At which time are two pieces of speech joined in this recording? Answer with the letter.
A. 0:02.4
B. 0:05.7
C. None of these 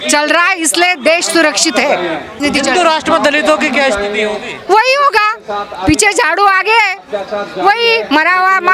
A